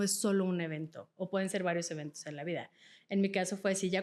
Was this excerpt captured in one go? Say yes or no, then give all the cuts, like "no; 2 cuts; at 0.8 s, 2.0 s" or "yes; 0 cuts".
yes; 0 cuts